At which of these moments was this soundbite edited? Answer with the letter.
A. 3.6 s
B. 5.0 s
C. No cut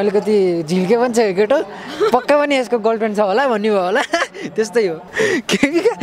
B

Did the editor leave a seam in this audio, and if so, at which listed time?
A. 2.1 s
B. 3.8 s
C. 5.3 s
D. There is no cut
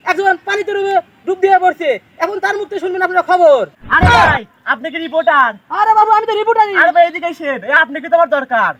D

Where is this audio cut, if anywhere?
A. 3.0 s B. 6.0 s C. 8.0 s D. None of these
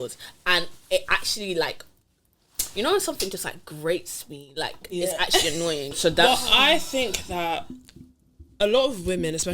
B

